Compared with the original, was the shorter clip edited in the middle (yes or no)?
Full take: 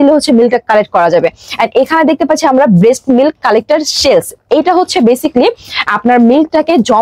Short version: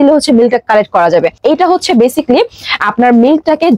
yes